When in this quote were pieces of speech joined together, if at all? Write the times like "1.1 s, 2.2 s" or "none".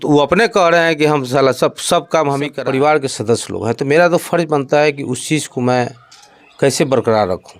2.5 s